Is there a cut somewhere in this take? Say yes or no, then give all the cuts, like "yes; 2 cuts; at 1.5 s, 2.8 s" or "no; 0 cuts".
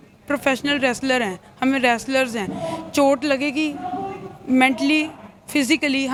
no; 0 cuts